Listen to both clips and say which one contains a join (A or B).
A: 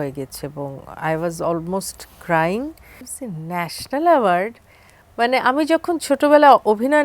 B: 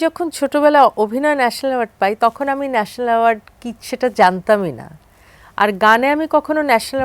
A